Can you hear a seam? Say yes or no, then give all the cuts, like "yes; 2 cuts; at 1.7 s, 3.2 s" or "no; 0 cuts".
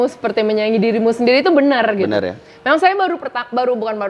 no; 0 cuts